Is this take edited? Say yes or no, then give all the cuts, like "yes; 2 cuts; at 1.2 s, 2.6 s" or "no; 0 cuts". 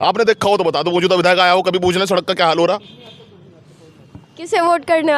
no; 0 cuts